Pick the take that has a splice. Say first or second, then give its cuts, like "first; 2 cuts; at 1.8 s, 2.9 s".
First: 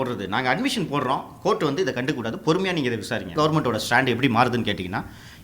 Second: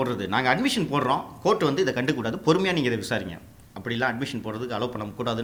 first; 1 cut; at 3.3 s